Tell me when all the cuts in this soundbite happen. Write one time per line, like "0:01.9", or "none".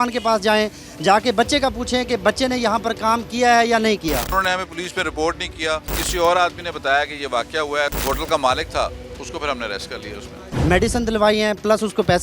0:04.3
0:05.9
0:08.0
0:10.5

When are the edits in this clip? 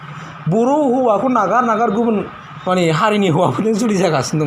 none

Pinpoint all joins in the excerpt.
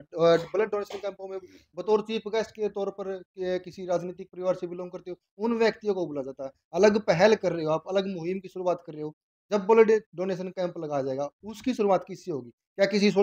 none

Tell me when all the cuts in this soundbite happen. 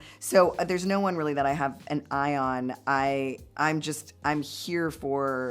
none

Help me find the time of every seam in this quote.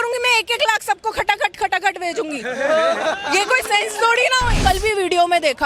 0:04.6

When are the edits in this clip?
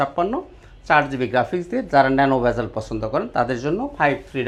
none

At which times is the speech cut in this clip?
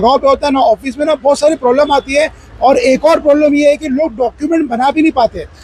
none

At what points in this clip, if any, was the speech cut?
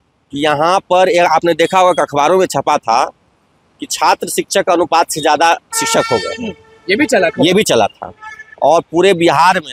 none

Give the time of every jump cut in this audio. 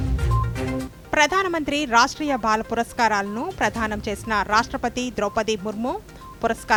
none

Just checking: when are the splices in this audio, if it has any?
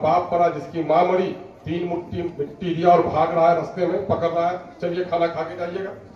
none

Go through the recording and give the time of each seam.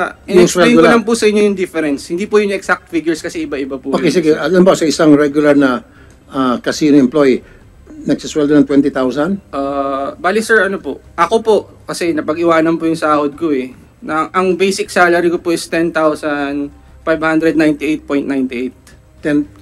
none

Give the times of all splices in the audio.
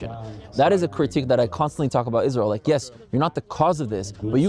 none

